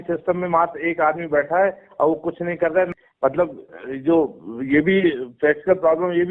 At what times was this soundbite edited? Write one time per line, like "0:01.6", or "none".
0:03.0